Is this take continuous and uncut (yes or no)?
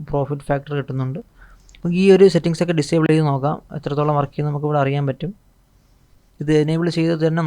yes